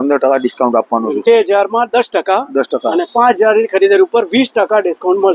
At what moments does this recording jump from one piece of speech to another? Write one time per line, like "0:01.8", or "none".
0:01.3